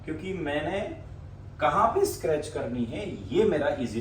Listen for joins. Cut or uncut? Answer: uncut